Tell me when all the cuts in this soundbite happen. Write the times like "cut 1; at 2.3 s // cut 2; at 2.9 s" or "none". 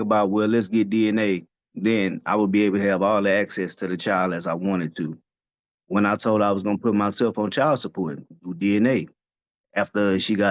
none